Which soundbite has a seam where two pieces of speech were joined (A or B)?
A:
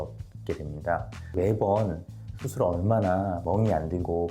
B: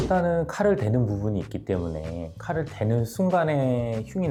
A